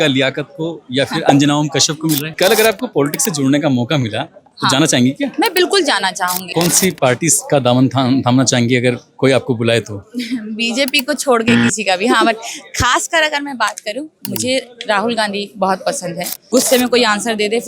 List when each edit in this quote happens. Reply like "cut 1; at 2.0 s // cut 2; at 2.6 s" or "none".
cut 1; at 2.4 s // cut 2; at 6.5 s // cut 3; at 16.5 s